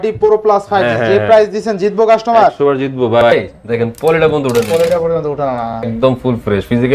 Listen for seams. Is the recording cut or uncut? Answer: cut